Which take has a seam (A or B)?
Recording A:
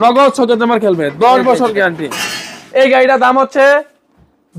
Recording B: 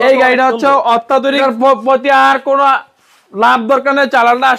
B